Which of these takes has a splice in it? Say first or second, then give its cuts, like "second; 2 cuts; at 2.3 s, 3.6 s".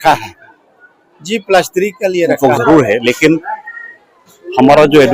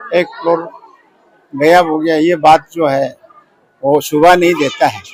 first; 1 cut; at 2.3 s